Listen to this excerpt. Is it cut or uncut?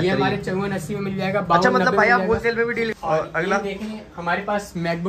cut